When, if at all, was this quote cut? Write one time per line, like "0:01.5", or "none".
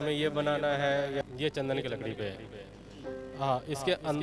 0:01.2

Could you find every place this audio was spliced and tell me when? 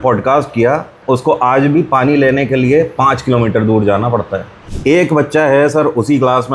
0:01.0
0:04.6

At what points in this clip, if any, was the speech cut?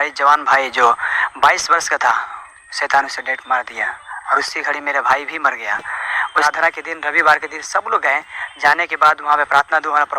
0:06.4

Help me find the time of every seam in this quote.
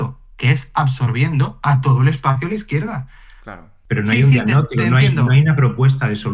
0:03.7

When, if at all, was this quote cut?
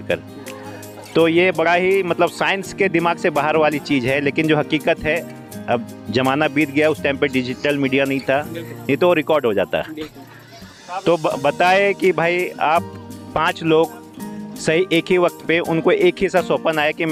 none

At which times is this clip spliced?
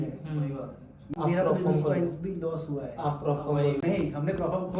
0:01.0
0:03.8

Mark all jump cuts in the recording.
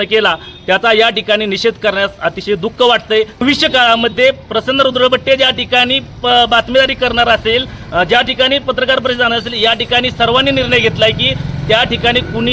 0:03.4

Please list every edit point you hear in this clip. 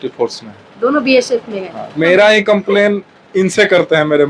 0:01.9

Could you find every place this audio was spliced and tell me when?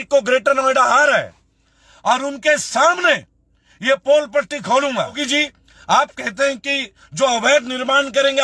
0:05.2

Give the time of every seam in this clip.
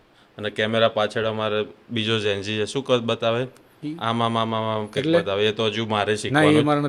none

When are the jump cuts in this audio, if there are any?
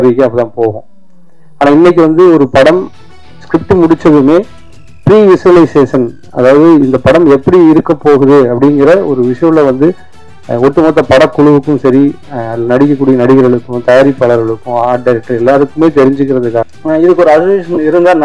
0:16.7

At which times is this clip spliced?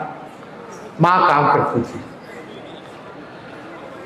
none

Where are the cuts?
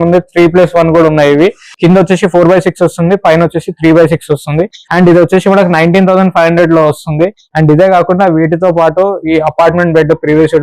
0:01.7

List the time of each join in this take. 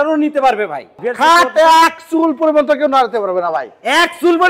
0:01.0

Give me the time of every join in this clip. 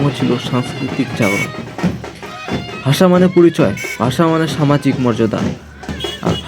0:01.5
0:02.8

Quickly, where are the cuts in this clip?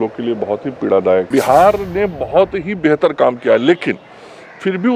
0:01.3

